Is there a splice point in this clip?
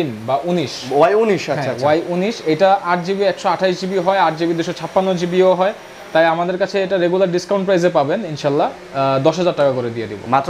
no; 0 cuts

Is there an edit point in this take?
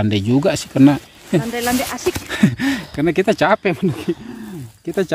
no; 0 cuts

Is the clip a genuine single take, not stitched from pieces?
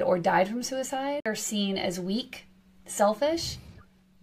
no; 1 cut; at 1.4 s

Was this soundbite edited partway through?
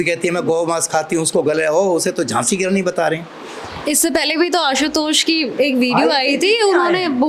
no; 0 cuts

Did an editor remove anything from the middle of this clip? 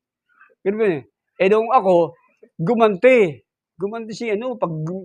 no; 0 cuts

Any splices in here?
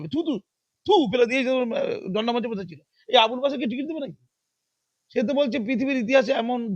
no; 0 cuts

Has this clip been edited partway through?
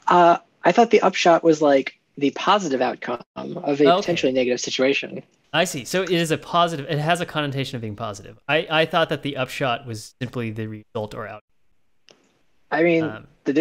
no; 0 cuts

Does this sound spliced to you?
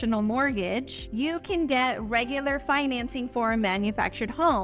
no; 0 cuts

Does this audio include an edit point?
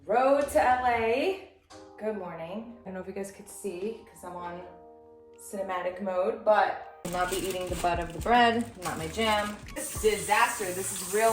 yes; 3 cuts; at 2.9 s, 6.9 s, 9.9 s

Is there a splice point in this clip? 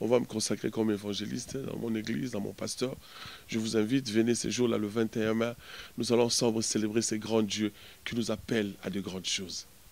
no; 0 cuts

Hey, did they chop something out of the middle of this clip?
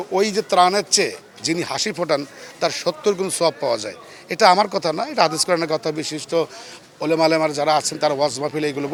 no; 0 cuts

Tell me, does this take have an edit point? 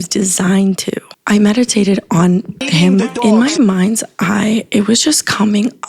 yes; 2 cuts; at 1.2 s, 3.2 s

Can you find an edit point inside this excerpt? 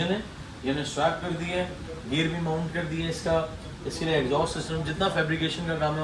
no; 0 cuts

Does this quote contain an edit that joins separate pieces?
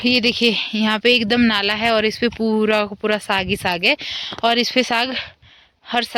no; 0 cuts

